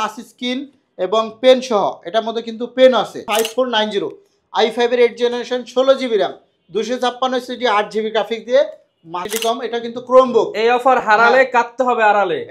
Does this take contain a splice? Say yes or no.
yes